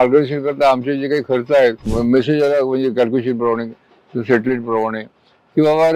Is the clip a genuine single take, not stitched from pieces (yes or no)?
no